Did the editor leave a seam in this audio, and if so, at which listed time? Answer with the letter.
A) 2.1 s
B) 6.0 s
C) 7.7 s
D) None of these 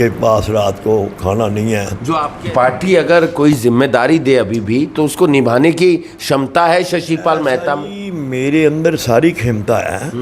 A